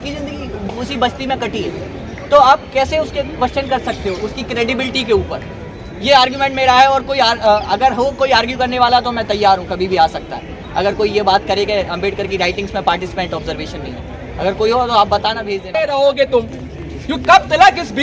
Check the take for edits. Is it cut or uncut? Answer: cut